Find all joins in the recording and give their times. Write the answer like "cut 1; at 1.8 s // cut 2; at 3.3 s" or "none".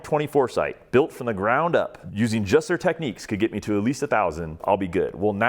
cut 1; at 2.0 s // cut 2; at 4.6 s